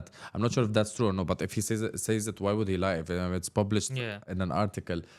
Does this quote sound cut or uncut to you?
cut